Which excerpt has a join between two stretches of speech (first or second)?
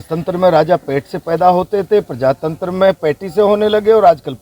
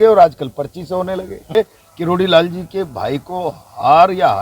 second